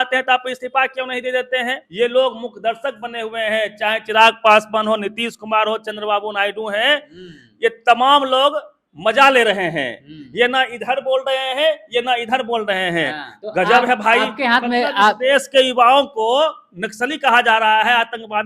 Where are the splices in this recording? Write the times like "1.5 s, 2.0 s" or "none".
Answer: 1.8 s, 13.3 s